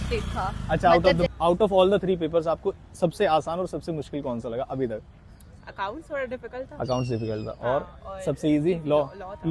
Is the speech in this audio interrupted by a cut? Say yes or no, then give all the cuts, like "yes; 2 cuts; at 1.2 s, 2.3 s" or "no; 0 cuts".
yes; 1 cut; at 1.3 s